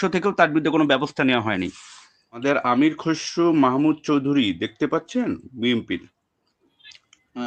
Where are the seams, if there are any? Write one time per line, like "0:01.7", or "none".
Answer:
0:02.4